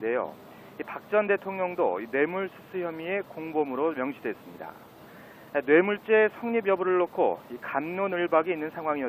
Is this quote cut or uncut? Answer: cut